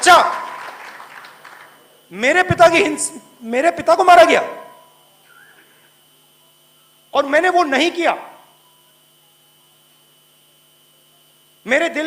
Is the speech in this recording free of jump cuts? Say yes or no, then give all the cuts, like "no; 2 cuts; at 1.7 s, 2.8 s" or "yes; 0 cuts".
yes; 0 cuts